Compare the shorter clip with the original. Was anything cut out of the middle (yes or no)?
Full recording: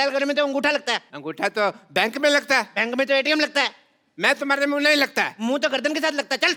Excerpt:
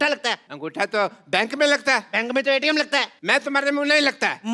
yes